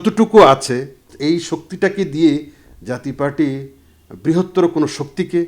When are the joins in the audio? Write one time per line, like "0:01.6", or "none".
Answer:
0:01.1